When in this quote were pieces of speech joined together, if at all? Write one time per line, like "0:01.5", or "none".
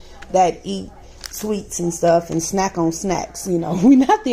none